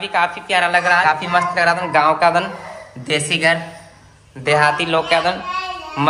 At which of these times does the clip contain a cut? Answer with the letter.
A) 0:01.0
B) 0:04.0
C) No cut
A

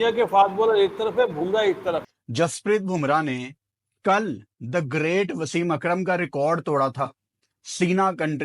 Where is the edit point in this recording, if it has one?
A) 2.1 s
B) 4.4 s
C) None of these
A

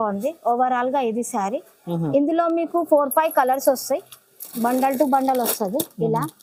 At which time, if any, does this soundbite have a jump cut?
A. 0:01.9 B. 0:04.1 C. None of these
C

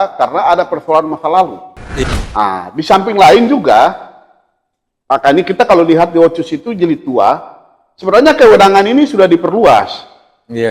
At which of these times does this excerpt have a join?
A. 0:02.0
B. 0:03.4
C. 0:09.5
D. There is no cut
A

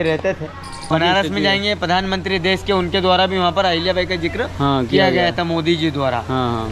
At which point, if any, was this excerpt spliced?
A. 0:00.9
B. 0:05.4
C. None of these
A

